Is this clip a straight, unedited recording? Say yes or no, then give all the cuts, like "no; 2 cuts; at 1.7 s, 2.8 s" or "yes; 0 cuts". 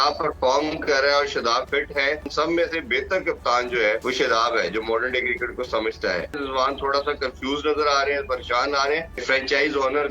no; 4 cuts; at 2.3 s, 4.0 s, 6.4 s, 9.2 s